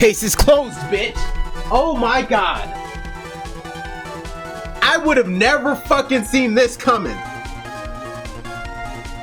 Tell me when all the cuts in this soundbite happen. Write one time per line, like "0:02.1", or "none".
none